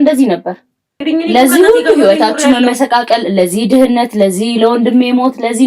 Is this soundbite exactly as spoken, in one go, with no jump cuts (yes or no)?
no